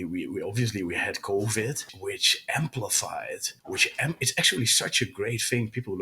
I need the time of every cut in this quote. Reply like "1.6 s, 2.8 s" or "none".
1.9 s, 3.5 s